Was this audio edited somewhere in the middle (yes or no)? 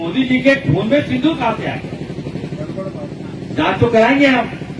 yes